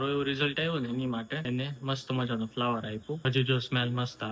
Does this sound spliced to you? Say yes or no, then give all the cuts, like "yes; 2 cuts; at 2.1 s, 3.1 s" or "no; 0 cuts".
yes; 2 cuts; at 1.4 s, 3.2 s